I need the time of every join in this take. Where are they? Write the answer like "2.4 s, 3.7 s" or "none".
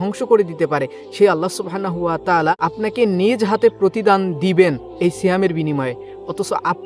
2.6 s